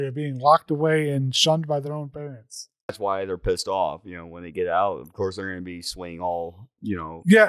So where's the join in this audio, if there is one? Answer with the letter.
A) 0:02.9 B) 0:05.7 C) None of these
A